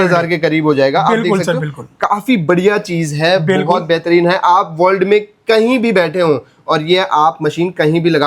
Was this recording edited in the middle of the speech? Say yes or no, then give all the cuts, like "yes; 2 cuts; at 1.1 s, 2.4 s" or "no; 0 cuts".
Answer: no; 0 cuts